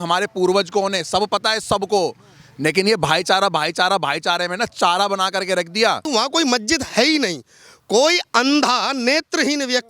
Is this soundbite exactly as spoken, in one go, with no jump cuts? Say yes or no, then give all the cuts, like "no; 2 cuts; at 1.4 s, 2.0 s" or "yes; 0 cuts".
no; 1 cut; at 6.0 s